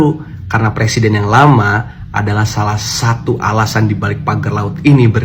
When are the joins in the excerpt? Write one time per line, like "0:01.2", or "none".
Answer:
none